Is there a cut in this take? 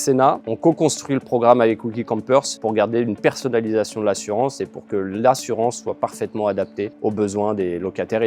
yes; 2 cuts; at 2.5 s, 6.9 s

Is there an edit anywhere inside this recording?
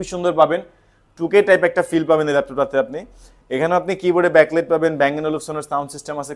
no; 0 cuts

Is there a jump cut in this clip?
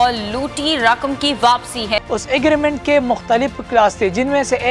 yes; 1 cut; at 2.0 s

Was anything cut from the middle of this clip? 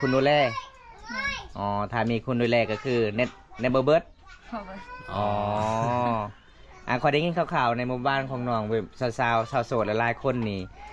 no; 0 cuts

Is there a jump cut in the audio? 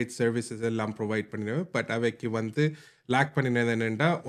no; 0 cuts

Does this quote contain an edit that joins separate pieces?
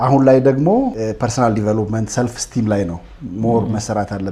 yes; 1 cut; at 1.0 s

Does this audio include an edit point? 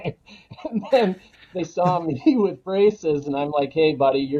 no; 0 cuts

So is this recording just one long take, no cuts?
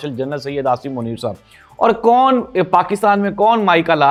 yes; 0 cuts

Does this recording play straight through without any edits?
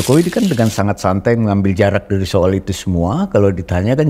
yes; 0 cuts

